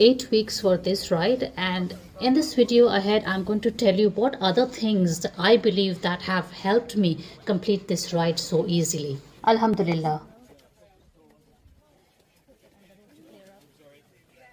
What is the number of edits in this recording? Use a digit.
0